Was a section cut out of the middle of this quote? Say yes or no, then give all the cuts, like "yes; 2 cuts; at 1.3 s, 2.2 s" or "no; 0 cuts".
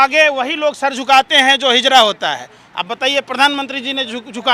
no; 0 cuts